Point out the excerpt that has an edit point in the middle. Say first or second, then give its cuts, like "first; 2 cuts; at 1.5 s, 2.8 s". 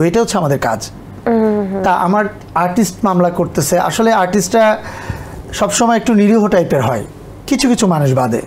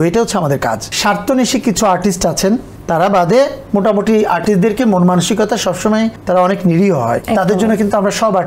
second; 4 cuts; at 0.9 s, 2.7 s, 6.2 s, 7.2 s